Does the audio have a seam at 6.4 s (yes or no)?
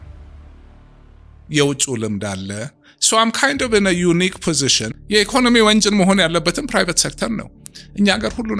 no